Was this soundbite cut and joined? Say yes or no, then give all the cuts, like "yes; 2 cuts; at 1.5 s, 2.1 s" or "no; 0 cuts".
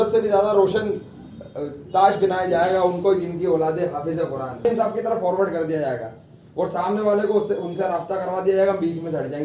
yes; 1 cut; at 4.6 s